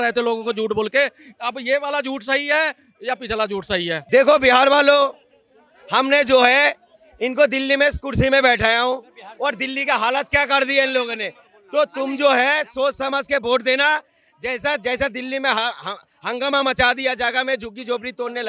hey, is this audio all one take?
no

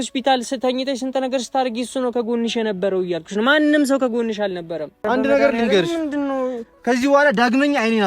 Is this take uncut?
no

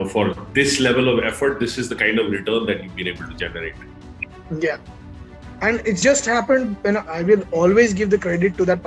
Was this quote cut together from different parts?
yes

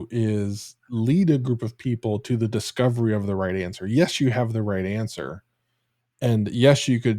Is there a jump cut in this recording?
no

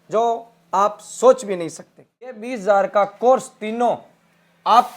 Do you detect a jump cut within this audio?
yes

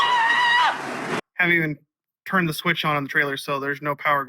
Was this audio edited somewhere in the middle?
yes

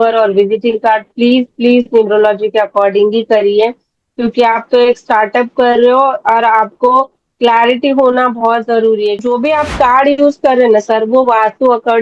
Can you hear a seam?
yes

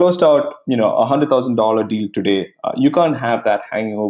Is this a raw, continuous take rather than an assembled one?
yes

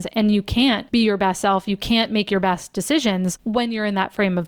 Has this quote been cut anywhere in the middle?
yes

